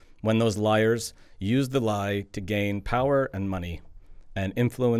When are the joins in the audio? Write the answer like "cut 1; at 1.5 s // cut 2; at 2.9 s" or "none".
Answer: none